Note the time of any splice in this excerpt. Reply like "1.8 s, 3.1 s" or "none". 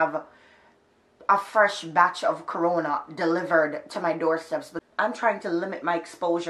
4.8 s